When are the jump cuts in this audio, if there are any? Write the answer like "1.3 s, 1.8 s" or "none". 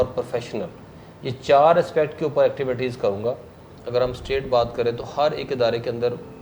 3.8 s